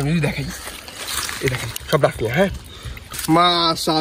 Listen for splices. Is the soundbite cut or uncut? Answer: cut